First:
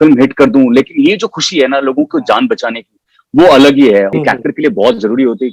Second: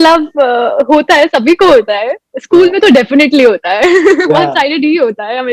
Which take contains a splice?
first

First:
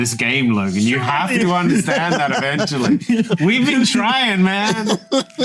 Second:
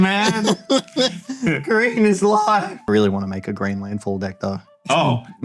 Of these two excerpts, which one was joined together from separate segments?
second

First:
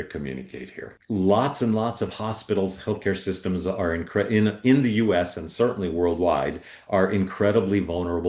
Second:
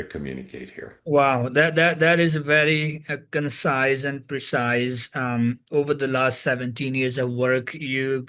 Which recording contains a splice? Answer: first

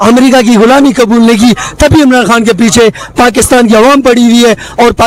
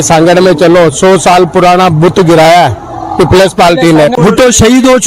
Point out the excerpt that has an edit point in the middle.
second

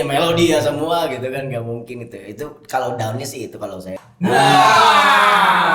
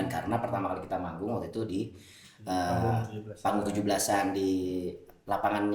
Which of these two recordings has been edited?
first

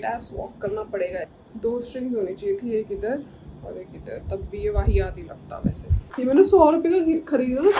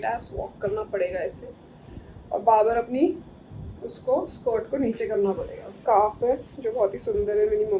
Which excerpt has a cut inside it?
first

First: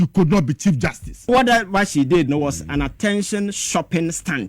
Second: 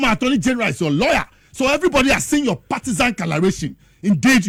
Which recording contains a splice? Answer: first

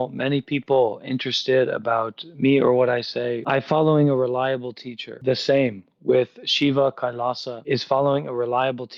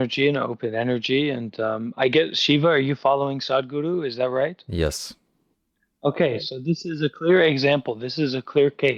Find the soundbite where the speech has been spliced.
first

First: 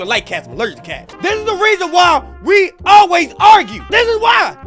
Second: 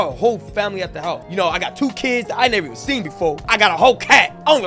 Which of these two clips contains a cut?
first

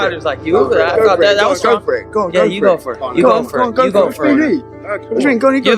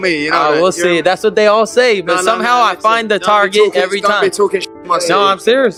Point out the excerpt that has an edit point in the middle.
first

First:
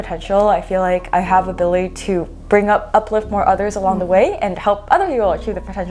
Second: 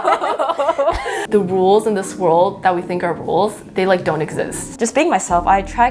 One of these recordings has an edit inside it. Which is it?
second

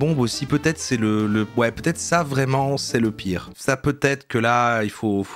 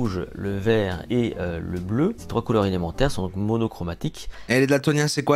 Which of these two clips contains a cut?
second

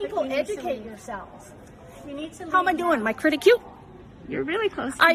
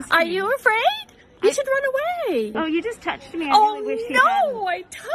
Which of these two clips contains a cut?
second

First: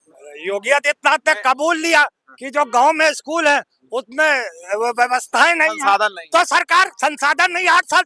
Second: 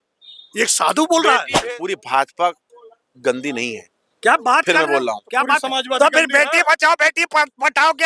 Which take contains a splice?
second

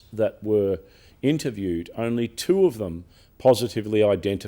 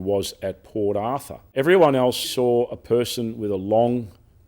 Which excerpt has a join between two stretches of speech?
second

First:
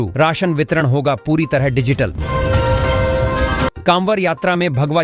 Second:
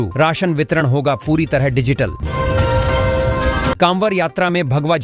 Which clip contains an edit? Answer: second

